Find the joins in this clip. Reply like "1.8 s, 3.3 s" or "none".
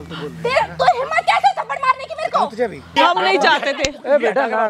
2.9 s